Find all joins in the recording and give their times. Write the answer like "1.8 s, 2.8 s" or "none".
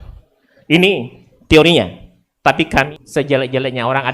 3.0 s